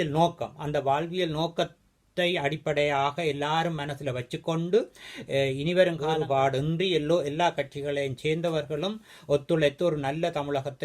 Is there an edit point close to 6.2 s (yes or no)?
yes